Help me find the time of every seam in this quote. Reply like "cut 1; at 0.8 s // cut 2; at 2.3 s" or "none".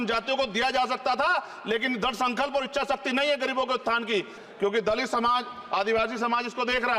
cut 1; at 4.4 s